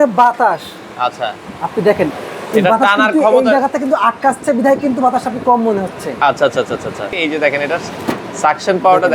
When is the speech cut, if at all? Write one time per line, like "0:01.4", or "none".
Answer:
0:07.2